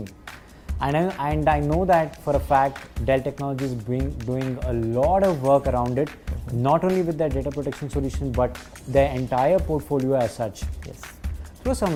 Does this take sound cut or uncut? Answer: uncut